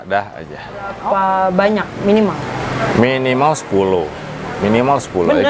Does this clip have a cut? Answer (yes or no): yes